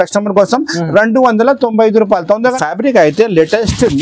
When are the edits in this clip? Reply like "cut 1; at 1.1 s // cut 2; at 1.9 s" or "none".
cut 1; at 2.4 s